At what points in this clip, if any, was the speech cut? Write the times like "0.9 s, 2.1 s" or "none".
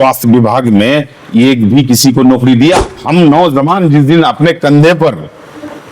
2.9 s